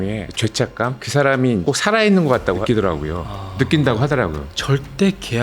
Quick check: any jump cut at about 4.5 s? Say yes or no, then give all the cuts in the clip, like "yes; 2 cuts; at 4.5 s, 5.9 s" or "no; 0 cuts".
yes; 2 cuts; at 2.6 s, 4.5 s